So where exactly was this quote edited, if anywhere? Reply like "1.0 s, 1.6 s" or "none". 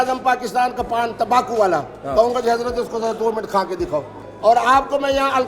4.2 s